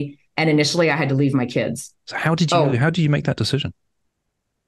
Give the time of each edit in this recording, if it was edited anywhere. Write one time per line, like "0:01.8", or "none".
0:02.0